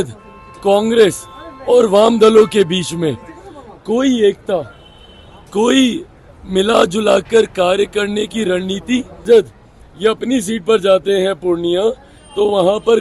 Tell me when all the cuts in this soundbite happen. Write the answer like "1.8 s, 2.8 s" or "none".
9.3 s